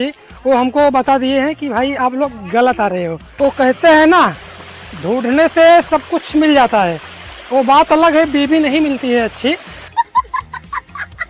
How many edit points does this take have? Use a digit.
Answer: 1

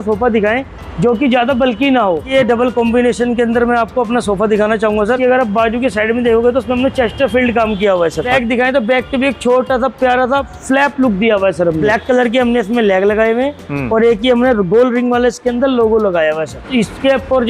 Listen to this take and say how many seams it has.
5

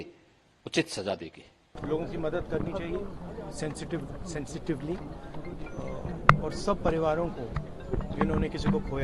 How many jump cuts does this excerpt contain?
1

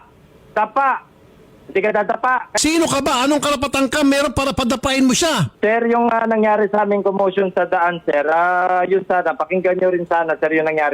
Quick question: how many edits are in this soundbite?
1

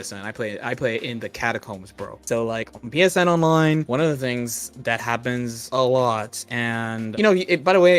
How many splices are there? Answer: 3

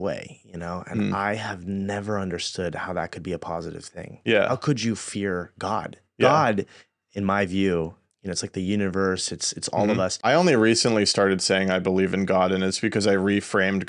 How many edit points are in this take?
1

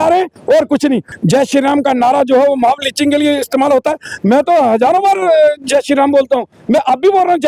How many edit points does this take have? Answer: 1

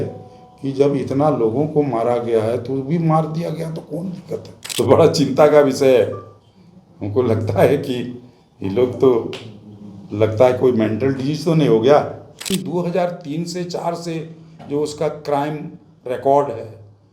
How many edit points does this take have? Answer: 2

